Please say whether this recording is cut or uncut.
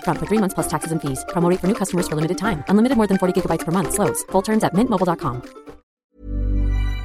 cut